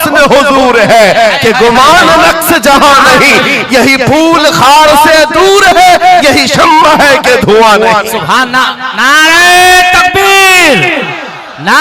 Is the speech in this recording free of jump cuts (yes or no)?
yes